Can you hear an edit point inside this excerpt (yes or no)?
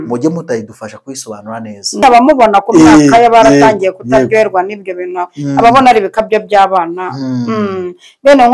yes